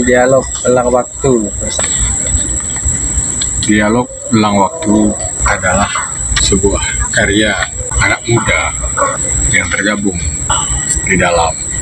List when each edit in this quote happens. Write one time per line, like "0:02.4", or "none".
0:01.6
0:05.4
0:06.4
0:07.9
0:09.3
0:10.5